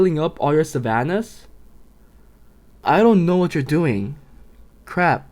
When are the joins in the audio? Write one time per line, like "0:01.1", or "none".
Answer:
0:02.8